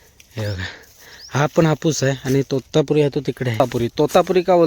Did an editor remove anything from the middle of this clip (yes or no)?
yes